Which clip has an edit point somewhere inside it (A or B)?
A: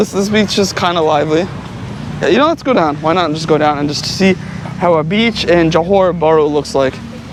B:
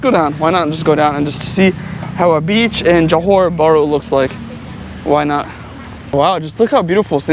B